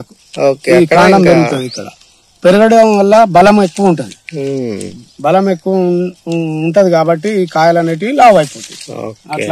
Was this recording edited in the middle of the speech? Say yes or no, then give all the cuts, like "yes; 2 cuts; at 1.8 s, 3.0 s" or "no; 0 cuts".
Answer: no; 0 cuts